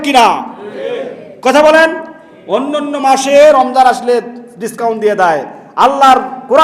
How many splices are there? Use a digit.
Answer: 0